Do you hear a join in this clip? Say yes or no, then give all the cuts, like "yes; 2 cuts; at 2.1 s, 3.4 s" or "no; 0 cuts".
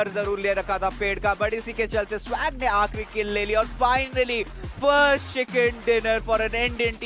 no; 0 cuts